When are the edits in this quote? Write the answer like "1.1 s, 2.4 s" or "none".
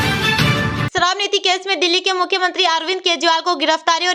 0.9 s